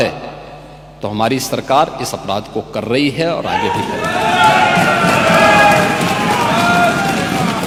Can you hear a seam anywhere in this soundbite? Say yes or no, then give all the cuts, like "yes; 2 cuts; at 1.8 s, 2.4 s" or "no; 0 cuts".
no; 0 cuts